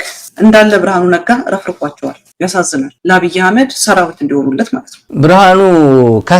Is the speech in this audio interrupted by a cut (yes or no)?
yes